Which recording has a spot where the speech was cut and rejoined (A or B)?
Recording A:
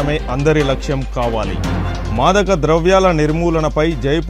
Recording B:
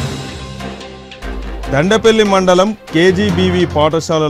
B